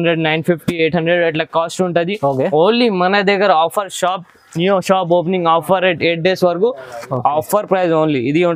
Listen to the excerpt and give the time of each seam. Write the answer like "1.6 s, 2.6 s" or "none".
6.9 s